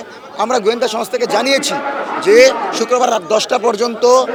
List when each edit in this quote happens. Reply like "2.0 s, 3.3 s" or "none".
none